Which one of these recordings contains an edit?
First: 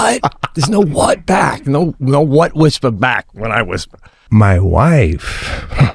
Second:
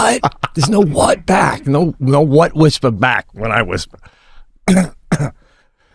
first; 1 cut; at 4.2 s

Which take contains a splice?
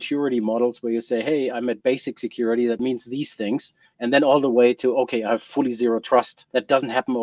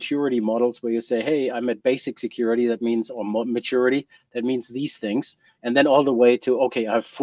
first; 2 cuts; at 2.8 s, 6.4 s

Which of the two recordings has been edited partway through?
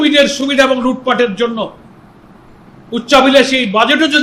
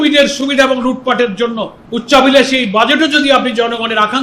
second; 1 cut; at 1.8 s

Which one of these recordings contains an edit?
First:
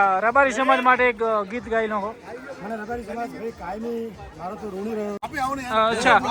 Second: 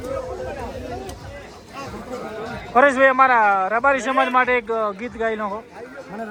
first; 1 cut; at 5.2 s

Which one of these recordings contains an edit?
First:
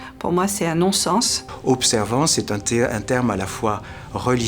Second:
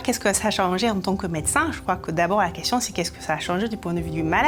first; 1 cut; at 1.4 s

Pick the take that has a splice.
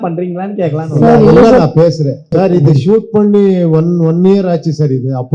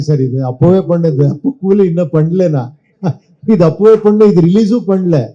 first; 1 cut; at 2.3 s

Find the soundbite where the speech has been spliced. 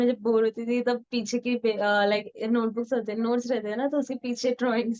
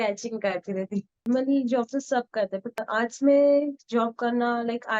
second; 2 cuts; at 1.2 s, 2.8 s

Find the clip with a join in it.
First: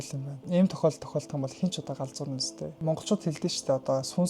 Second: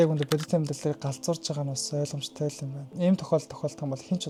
first; 1 cut; at 2.8 s

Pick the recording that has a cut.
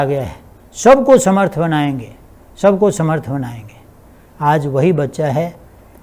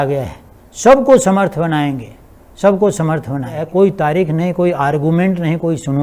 second; 1 cut; at 3.6 s

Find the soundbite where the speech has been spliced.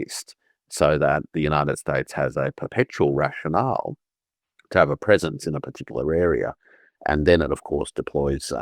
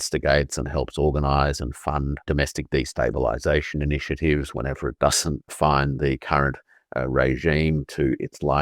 second; 2 cuts; at 2.2 s, 5.5 s

